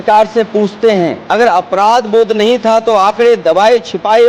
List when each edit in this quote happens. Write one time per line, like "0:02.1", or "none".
0:01.2